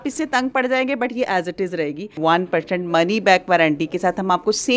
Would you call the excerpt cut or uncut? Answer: cut